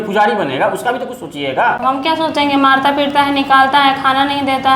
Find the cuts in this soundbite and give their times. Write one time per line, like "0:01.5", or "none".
0:01.8